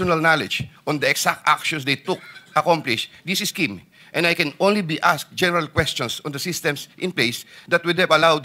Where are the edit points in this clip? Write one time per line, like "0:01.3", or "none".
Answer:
none